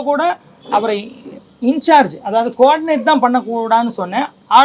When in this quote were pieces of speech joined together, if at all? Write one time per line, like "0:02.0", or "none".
none